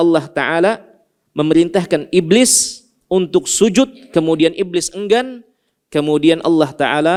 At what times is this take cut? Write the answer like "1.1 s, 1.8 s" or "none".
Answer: none